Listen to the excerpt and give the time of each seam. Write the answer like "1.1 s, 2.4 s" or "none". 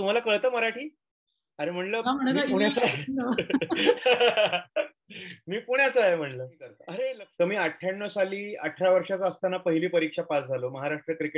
7.2 s

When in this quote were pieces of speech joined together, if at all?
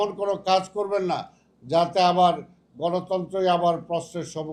none

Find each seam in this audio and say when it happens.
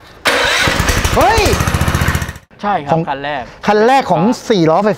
2.3 s

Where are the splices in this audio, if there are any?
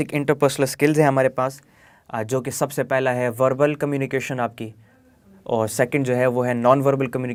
none

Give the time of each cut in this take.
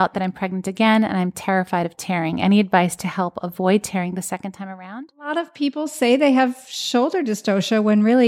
5.5 s

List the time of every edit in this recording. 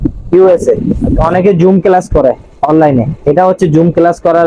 1.1 s

